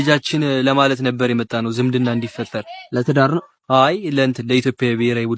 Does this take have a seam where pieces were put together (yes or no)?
no